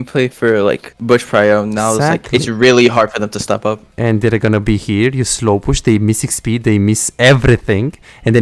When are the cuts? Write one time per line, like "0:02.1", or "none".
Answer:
0:00.9